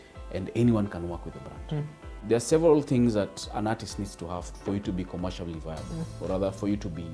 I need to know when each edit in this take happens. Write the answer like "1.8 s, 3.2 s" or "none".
2.1 s